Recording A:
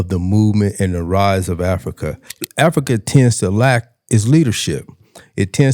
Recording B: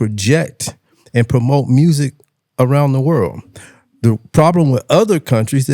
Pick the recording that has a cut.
A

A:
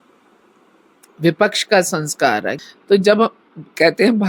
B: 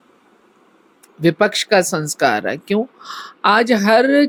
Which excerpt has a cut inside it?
A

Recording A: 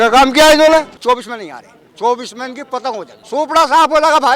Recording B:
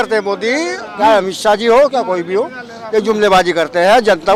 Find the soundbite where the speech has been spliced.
A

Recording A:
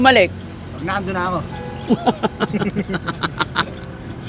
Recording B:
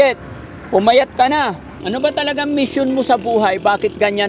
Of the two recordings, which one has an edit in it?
B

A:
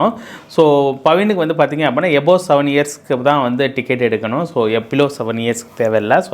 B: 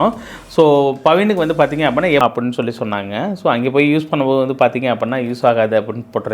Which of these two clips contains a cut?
B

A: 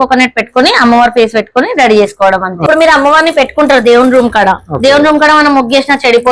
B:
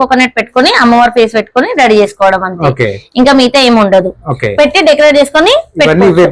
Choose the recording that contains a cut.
A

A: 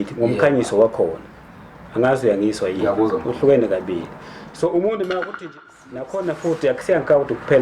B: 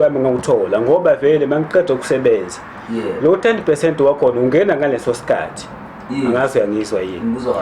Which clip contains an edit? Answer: A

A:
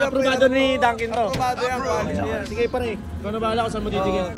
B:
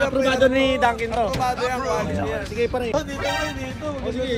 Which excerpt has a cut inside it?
B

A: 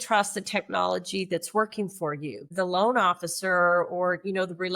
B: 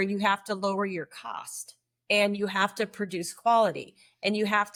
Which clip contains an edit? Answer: A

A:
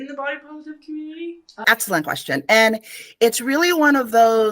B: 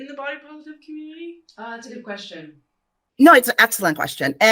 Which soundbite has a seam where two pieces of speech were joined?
A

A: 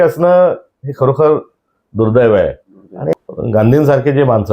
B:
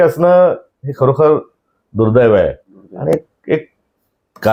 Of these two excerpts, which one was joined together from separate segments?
A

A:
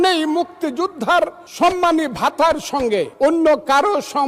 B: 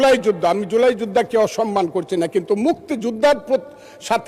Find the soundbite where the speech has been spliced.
A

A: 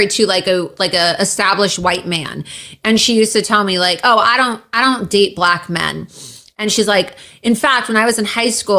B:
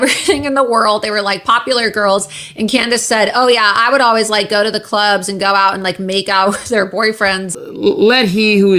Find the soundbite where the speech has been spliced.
B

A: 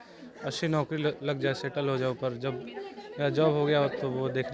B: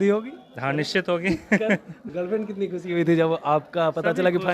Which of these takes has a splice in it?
B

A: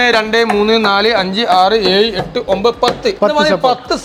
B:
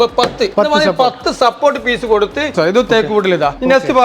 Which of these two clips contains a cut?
B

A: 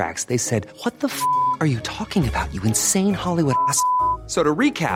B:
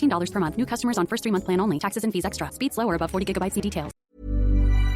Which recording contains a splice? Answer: B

